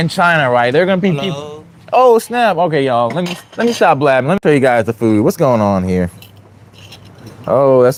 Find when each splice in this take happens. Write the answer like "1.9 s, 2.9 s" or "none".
none